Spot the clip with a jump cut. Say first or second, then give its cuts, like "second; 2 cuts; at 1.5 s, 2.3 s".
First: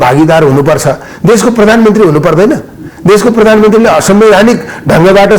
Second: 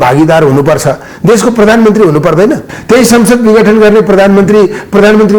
second; 1 cut; at 2.7 s